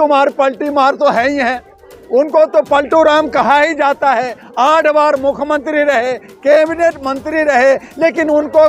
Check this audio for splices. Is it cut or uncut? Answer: uncut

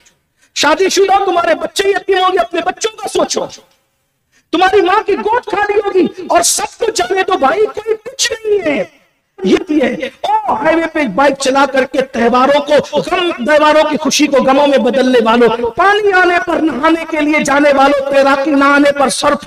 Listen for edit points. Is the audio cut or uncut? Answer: cut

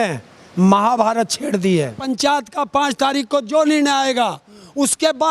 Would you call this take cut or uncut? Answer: cut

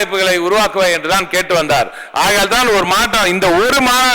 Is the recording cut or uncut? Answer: uncut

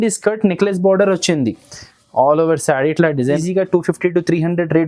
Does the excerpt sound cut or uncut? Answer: cut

